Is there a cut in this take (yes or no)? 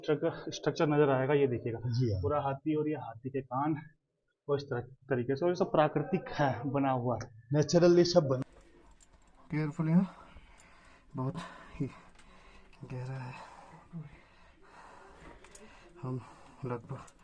yes